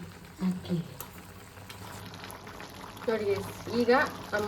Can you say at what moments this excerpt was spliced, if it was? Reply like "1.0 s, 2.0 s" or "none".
2.0 s